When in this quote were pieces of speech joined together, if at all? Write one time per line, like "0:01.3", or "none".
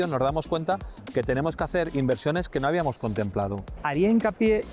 0:03.8